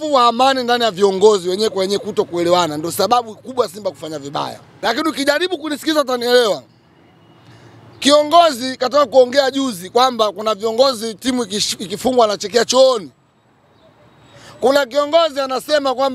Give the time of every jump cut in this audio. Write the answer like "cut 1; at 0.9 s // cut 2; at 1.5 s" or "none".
cut 1; at 4.7 s